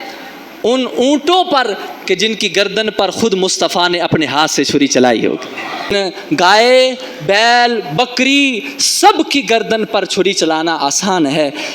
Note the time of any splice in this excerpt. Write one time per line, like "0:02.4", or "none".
0:05.9